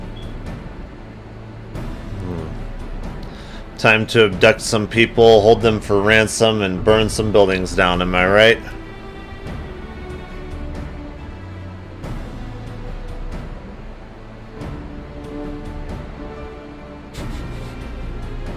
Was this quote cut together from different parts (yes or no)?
no